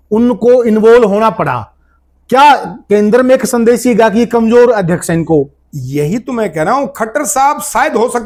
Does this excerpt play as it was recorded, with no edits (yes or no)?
yes